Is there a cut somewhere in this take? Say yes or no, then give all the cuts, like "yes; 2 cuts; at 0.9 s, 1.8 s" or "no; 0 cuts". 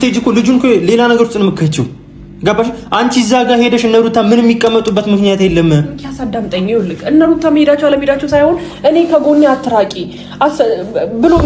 no; 0 cuts